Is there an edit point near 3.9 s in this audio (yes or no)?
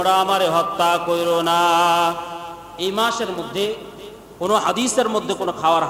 no